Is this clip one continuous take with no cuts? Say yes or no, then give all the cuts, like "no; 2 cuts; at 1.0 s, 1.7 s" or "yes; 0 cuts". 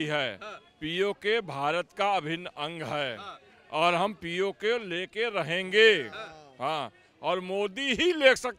yes; 0 cuts